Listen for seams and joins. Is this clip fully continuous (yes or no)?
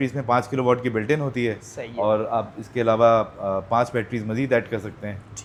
yes